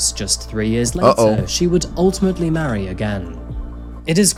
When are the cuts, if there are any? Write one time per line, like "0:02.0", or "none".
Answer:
none

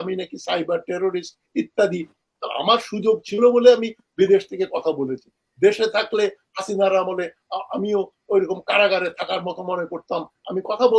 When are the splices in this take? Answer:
none

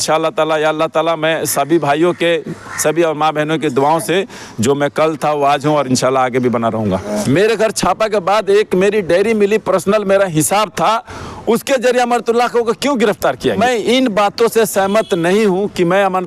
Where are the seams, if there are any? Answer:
0:07.1
0:13.6

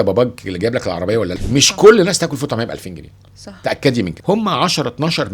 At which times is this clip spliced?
0:01.4
0:04.2

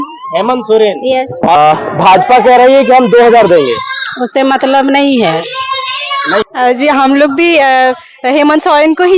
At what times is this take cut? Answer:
0:01.5
0:06.5

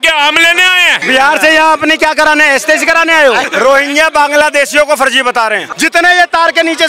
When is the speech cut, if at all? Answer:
0:01.0
0:03.5
0:05.6

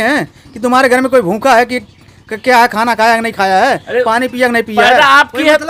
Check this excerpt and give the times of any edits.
none

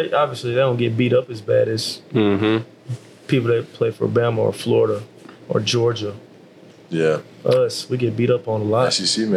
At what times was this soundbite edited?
none

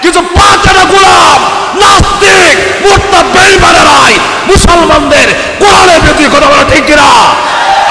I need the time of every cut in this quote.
none

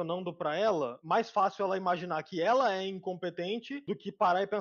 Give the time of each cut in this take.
0:01.0

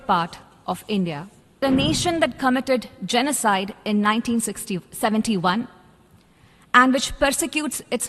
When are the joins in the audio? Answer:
0:01.6

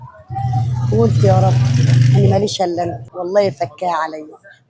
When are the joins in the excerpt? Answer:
0:03.1

